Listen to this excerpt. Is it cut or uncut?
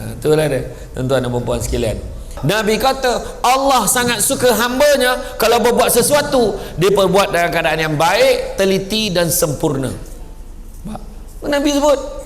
cut